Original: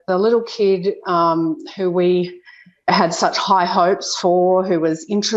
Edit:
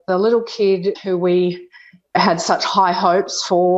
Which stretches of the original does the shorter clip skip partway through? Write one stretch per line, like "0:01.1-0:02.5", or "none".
0:01.0-0:01.7